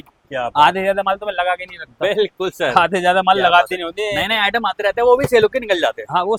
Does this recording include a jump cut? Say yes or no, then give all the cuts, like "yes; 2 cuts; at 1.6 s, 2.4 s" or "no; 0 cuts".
no; 0 cuts